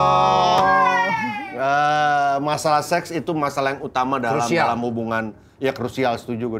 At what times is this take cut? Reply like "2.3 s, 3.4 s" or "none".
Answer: 1.2 s

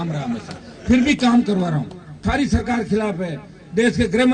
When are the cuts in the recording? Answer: 2.2 s

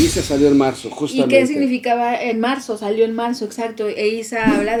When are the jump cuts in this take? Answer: none

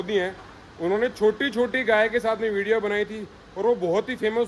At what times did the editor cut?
none

